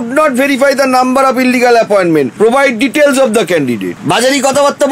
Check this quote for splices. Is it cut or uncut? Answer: cut